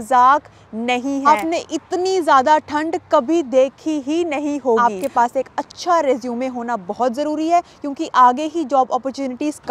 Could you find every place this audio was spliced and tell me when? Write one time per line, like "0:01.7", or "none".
0:01.3
0:04.8